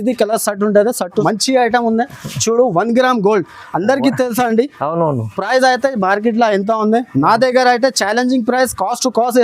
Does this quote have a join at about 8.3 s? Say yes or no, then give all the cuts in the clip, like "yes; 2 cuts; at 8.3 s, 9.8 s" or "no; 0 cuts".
no; 1 cut; at 1.2 s